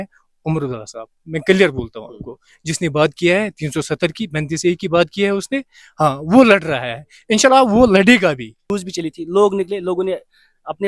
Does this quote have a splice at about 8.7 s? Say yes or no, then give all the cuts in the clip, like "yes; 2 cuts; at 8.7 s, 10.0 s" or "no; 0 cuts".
yes; 1 cut; at 8.7 s